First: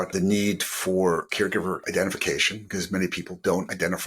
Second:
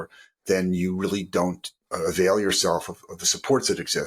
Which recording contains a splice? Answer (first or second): first